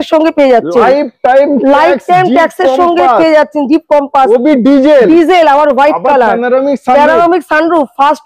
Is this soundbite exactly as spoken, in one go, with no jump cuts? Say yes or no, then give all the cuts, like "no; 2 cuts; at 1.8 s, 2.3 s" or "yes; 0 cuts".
yes; 0 cuts